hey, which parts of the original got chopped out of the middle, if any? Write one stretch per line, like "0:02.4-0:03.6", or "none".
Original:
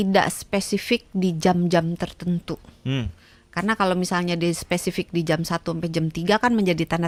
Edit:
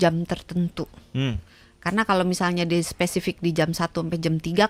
none